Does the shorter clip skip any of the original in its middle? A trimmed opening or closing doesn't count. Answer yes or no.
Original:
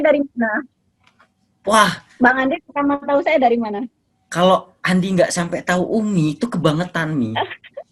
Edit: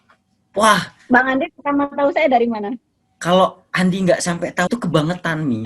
yes